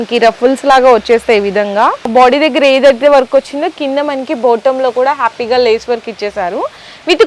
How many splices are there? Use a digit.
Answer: 1